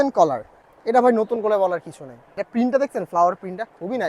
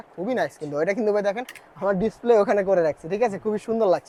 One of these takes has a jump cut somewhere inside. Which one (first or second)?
first